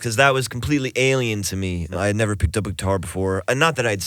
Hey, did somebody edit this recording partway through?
yes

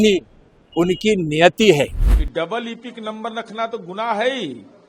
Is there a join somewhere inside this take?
yes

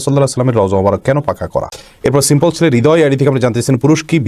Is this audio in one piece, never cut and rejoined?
no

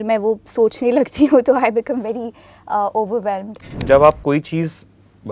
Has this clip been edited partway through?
yes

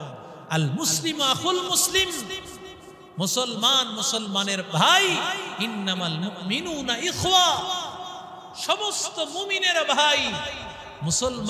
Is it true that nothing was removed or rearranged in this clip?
yes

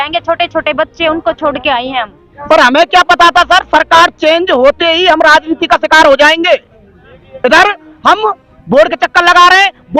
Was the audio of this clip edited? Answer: yes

